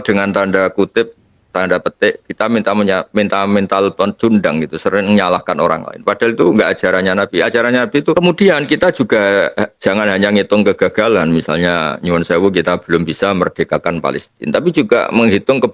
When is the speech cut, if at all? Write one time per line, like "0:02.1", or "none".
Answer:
0:08.1